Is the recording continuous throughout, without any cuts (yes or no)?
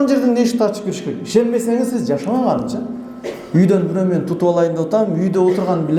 yes